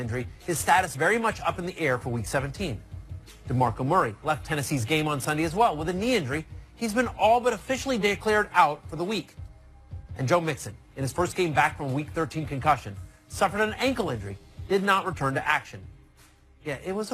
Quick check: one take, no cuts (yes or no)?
yes